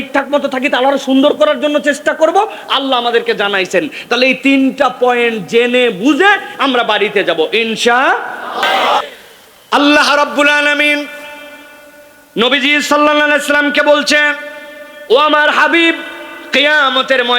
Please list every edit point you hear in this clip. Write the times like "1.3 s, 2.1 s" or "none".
9.0 s